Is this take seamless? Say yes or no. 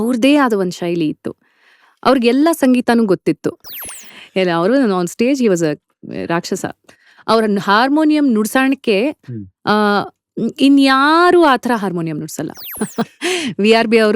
no